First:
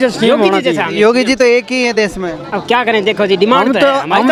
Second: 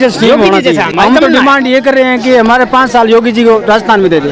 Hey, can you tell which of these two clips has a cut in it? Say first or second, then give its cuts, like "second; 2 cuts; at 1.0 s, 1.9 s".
second; 1 cut; at 0.9 s